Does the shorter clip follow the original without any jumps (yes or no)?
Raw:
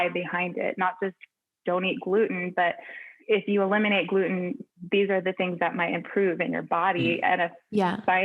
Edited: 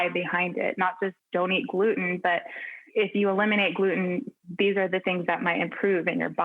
no